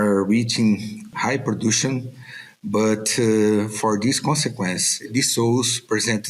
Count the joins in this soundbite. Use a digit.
2